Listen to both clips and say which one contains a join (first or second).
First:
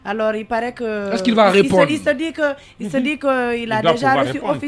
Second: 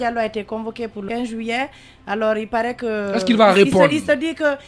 second